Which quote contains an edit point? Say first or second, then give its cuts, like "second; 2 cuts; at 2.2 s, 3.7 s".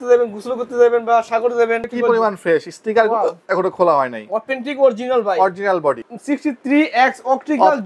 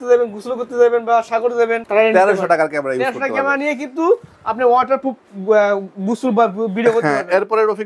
first; 2 cuts; at 1.8 s, 6.1 s